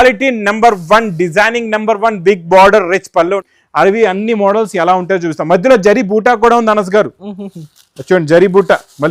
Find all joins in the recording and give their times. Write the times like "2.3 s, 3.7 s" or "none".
3.4 s

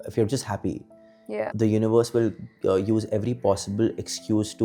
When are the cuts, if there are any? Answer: 1.4 s

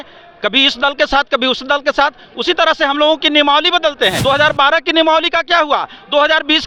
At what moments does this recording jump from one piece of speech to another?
4.2 s

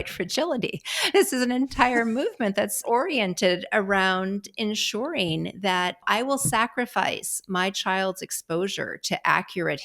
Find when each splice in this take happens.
2.8 s, 6.0 s

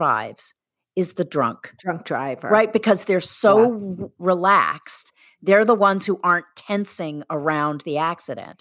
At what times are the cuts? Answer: none

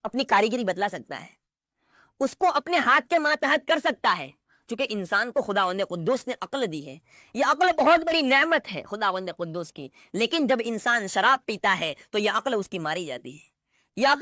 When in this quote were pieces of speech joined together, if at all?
none

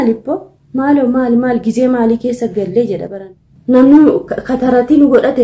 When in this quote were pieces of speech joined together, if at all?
3.1 s

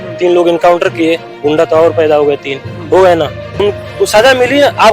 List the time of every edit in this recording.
3.5 s

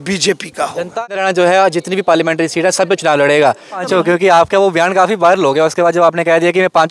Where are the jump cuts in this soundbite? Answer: 1.0 s, 3.8 s

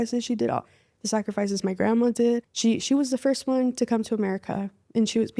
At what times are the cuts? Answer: 2.5 s

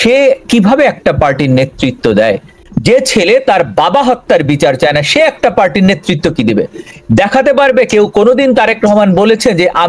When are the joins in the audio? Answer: 2.6 s

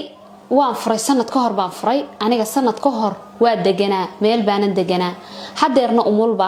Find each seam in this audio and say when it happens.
none

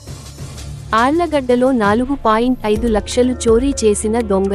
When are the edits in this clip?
0.9 s

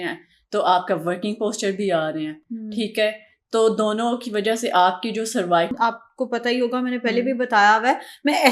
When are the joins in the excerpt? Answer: none

